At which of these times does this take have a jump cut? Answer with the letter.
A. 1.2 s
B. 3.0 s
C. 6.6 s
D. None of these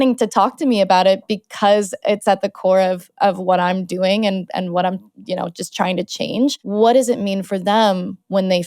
C